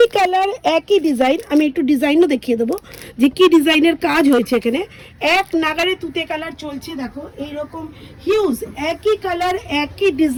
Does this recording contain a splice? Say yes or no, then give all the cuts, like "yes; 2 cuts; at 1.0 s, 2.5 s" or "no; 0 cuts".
no; 0 cuts